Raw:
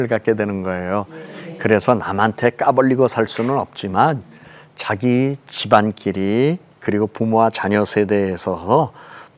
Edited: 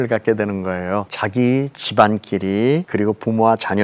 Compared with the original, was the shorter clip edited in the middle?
yes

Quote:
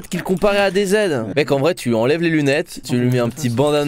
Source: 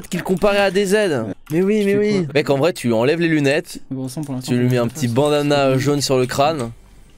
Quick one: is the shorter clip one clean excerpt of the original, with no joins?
no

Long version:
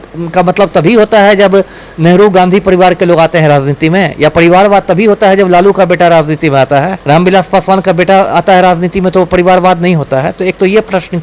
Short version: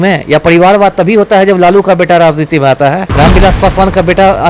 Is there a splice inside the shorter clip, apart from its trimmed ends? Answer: no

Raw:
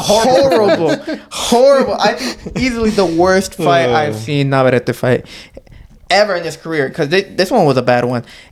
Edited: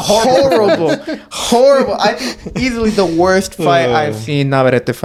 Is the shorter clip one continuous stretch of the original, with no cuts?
yes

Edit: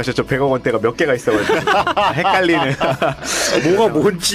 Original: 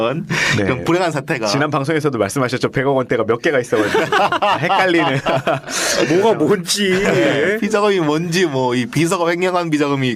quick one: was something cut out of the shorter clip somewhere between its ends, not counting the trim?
no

